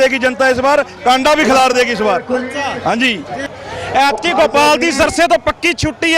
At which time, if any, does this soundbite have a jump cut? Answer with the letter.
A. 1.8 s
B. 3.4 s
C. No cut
B